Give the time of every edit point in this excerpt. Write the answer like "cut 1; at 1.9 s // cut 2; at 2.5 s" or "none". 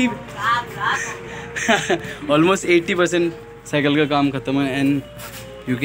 none